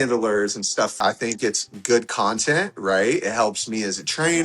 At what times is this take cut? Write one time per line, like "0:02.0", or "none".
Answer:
0:00.9